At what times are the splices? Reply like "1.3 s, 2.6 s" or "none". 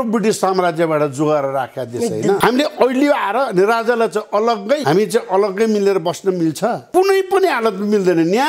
2.4 s, 4.8 s, 6.8 s